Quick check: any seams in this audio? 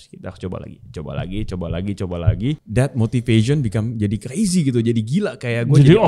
yes; 1 cut; at 2.6 s

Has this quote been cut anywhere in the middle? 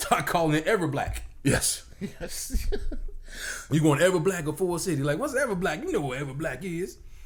no; 0 cuts

